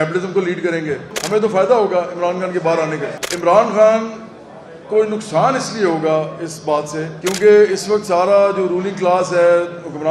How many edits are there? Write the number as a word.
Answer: three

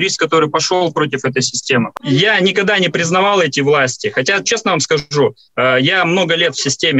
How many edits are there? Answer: one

